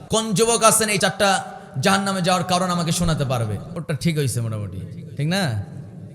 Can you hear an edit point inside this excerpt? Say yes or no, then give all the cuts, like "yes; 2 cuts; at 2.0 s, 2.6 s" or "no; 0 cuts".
yes; 2 cuts; at 1.0 s, 3.7 s